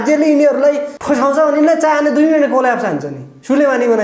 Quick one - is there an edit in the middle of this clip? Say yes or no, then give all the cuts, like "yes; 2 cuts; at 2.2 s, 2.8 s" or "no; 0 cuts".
yes; 1 cut; at 0.9 s